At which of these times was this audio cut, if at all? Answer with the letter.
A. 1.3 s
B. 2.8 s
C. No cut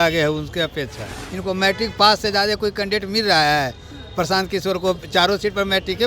A